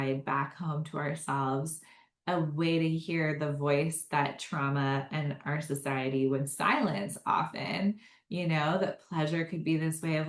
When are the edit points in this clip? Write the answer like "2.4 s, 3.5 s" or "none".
none

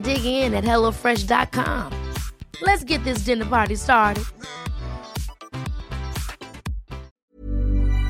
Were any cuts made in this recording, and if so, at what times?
7.1 s

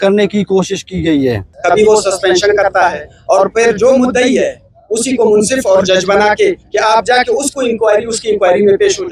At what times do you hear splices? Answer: 1.5 s

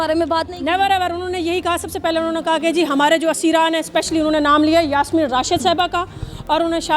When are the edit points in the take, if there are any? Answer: none

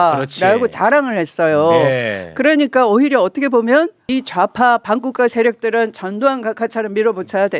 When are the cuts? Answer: 4.0 s

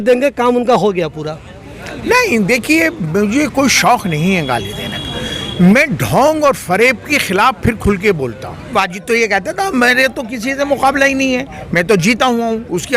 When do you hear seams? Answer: 8.7 s

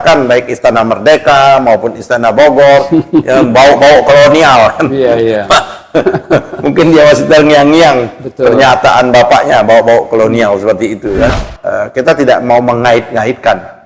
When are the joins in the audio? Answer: 11.4 s

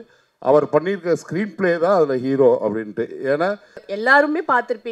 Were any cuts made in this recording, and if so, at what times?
3.8 s

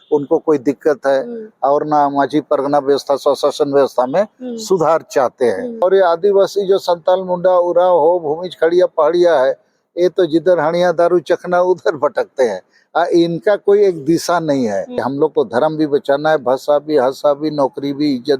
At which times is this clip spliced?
5.8 s, 14.9 s

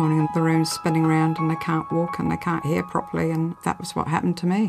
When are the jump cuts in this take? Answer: 3.6 s

